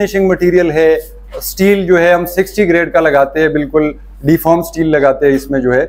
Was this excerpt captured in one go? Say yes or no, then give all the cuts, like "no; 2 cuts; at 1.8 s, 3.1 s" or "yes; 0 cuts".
yes; 0 cuts